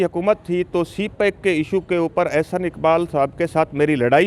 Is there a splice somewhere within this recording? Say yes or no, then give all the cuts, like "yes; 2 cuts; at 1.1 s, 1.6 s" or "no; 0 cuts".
no; 0 cuts